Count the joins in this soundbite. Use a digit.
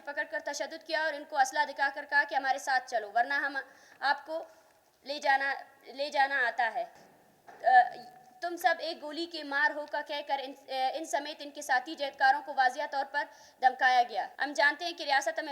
2